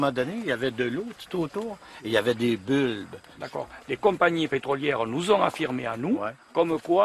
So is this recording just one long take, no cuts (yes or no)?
no